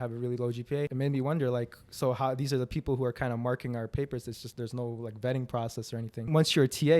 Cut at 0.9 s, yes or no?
yes